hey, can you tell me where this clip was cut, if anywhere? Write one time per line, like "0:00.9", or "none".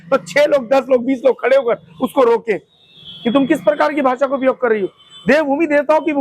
none